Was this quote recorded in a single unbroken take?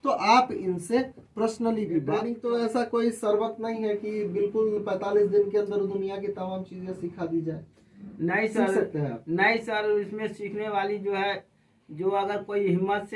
no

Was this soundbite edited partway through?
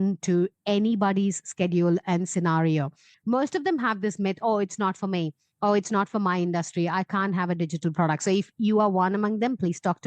yes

